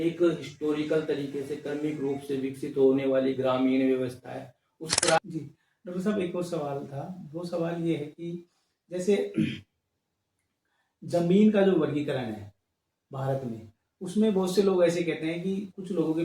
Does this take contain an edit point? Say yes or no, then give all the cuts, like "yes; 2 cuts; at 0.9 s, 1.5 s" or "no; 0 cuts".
yes; 1 cut; at 5.2 s